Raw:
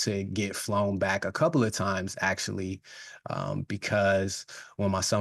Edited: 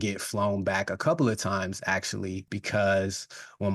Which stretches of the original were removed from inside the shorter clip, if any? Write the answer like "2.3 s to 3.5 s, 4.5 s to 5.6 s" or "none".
2.9 s to 3.7 s